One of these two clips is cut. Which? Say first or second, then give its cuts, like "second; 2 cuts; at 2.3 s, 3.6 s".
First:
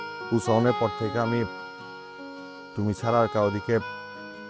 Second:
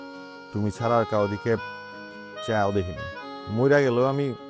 second; 1 cut; at 3.3 s